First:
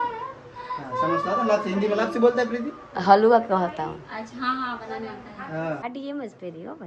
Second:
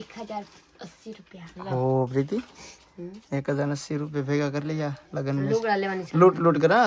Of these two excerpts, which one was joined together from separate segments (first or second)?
first